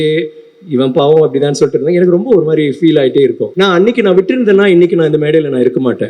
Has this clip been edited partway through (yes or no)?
yes